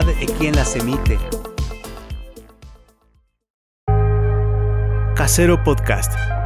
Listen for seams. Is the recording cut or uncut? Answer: uncut